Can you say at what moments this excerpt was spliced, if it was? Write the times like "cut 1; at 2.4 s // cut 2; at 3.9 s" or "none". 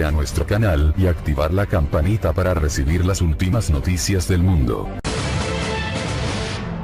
cut 1; at 4.9 s